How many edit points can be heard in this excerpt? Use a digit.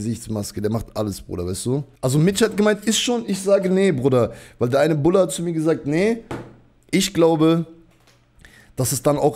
1